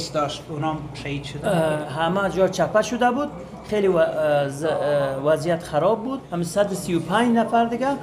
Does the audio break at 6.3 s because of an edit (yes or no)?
yes